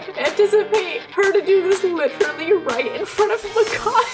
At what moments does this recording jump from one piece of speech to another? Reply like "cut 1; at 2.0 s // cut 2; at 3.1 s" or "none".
none